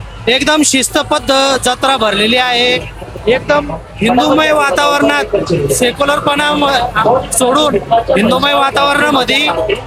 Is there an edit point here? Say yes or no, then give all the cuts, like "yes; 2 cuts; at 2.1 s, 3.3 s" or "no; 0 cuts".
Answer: no; 0 cuts